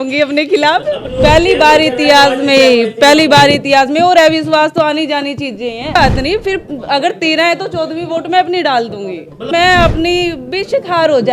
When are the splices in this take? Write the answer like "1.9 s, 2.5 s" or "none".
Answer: 1.1 s, 5.9 s, 9.5 s